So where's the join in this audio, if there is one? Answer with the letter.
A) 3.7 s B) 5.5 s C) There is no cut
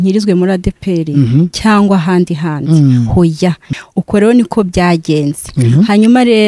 A